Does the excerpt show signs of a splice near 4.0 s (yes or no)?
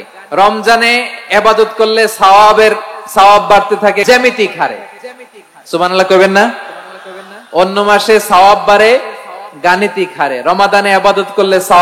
yes